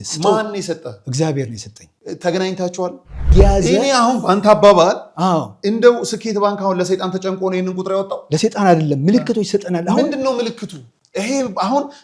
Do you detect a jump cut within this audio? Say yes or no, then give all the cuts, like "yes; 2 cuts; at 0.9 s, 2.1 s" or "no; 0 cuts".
yes; 1 cut; at 3.3 s